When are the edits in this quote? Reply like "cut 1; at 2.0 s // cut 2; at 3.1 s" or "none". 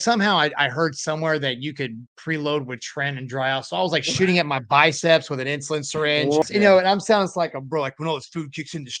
cut 1; at 6.4 s

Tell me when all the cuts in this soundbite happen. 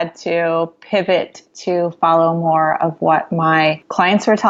none

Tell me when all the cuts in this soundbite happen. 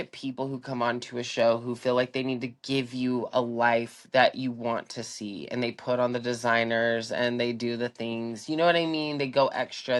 none

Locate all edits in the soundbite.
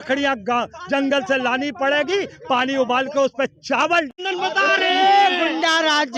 cut 1; at 4.2 s

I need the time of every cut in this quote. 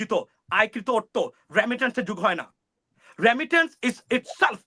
none

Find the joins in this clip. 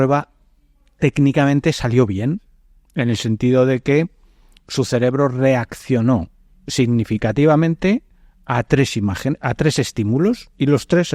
none

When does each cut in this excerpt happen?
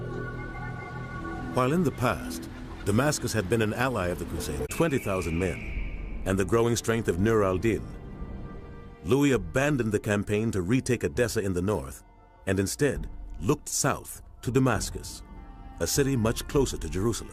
none

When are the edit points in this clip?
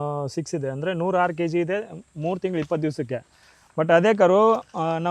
none

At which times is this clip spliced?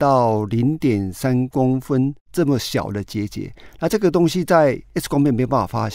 cut 1; at 4.9 s

